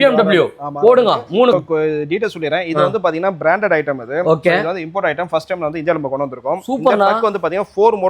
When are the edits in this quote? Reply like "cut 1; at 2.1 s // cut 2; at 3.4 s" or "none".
cut 1; at 1.5 s